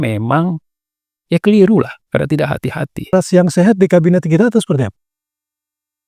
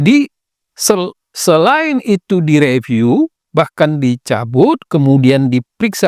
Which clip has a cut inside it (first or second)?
first